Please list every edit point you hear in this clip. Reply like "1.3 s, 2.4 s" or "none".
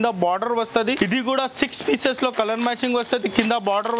1.0 s